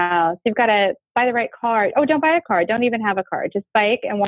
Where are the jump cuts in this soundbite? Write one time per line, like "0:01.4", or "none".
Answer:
none